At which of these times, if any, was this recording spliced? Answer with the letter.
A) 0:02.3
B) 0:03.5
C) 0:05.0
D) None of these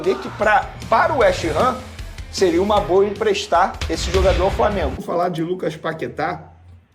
C